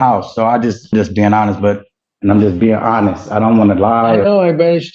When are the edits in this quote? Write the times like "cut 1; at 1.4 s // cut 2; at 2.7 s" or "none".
cut 1; at 0.9 s // cut 2; at 1.9 s

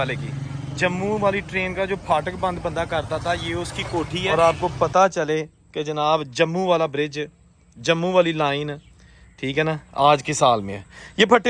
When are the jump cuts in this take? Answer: cut 1; at 4.2 s

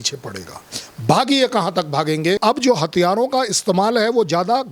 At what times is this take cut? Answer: cut 1; at 2.4 s

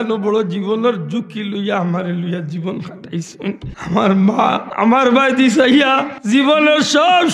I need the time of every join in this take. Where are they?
cut 1; at 3.7 s // cut 2; at 4.7 s // cut 3; at 6.1 s

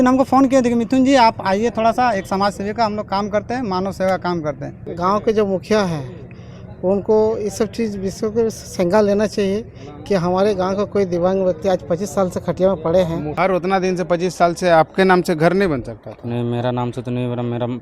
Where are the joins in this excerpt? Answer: cut 1; at 4.8 s // cut 2; at 13.3 s

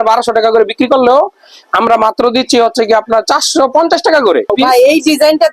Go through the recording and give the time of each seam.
cut 1; at 4.5 s

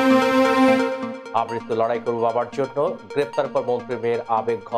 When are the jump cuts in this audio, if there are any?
cut 1; at 1.1 s

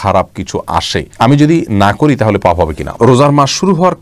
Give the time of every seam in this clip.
cut 1; at 2.9 s

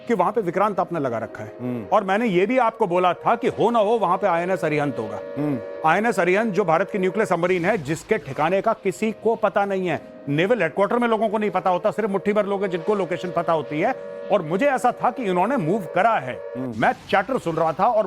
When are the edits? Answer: cut 1; at 6.7 s

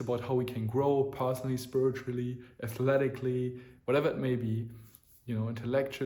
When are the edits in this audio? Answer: none

